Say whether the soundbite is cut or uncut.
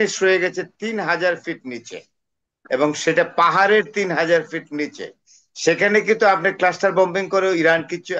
uncut